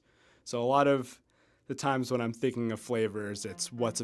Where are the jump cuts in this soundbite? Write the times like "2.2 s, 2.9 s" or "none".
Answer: none